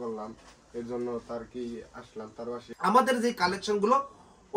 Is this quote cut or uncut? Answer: cut